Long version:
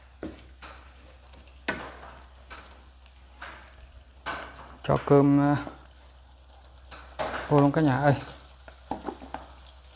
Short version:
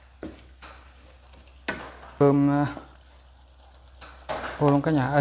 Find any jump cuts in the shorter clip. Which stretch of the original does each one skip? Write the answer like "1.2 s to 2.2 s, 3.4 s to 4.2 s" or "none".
2.2 s to 5.1 s